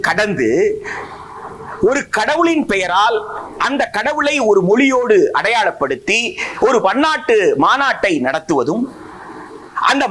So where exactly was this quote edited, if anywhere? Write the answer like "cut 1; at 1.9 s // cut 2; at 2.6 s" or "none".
none